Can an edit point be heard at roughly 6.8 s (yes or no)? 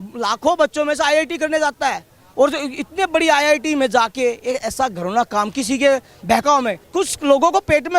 yes